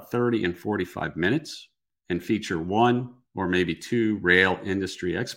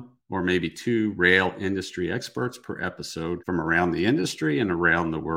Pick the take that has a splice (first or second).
second